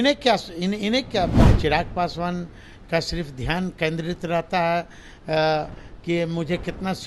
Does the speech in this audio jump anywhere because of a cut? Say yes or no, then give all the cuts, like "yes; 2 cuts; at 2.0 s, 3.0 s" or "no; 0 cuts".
yes; 1 cut; at 1.5 s